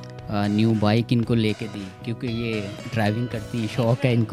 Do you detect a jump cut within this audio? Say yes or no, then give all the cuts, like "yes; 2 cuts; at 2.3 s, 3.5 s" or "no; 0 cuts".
no; 0 cuts